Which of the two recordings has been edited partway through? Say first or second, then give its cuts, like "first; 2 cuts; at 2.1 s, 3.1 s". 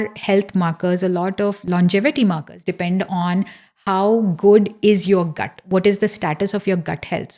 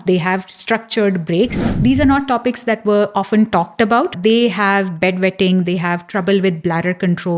second; 2 cuts; at 1.6 s, 4.1 s